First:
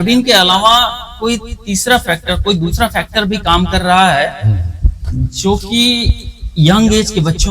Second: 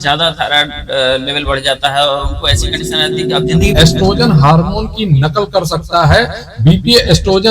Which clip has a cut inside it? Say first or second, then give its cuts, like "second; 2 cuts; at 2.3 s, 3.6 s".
second; 1 cut; at 3.7 s